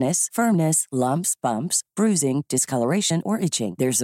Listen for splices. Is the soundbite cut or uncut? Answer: uncut